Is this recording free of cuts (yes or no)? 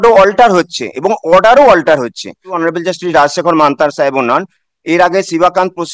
no